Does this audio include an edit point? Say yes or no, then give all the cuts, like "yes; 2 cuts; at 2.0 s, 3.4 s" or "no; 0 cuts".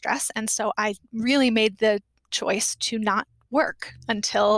no; 0 cuts